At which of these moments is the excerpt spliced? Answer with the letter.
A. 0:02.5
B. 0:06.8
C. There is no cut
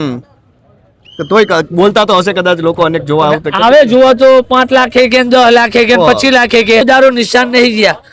B